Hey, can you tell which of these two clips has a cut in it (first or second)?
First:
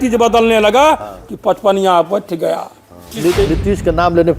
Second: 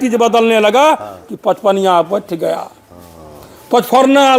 first